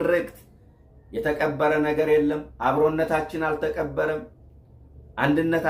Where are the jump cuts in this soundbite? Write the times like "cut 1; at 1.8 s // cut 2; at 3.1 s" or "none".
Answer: none